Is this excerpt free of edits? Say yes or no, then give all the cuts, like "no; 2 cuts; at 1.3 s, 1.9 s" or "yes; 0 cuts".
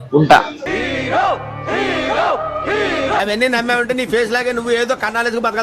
yes; 0 cuts